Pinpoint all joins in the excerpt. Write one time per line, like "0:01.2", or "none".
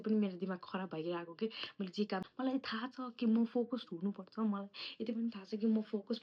0:02.2